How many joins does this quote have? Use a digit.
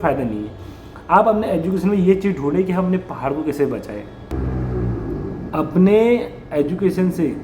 1